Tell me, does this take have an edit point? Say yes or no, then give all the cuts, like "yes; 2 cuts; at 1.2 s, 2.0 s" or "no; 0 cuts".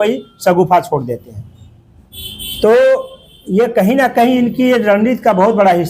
no; 0 cuts